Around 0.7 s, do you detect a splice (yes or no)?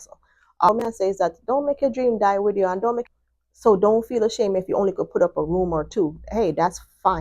yes